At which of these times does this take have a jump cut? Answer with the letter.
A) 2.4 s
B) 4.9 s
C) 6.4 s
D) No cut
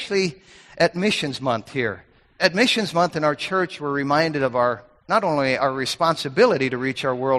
A